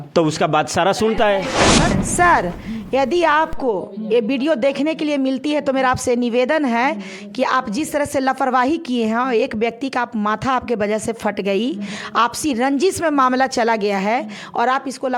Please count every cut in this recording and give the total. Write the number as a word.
one